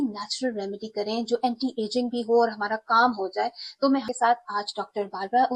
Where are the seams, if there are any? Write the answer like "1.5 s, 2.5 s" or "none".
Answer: 4.0 s